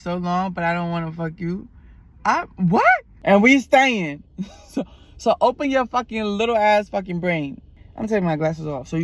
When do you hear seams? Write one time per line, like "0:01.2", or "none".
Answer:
0:03.1
0:07.8